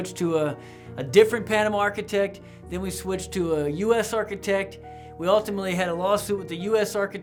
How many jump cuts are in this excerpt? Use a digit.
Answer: 0